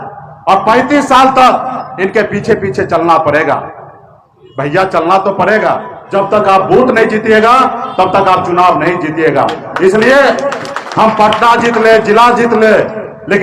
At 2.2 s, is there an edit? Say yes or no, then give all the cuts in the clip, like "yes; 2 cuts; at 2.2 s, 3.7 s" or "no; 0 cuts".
no; 1 cut; at 5.9 s